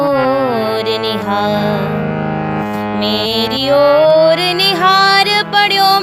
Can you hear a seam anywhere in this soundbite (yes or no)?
no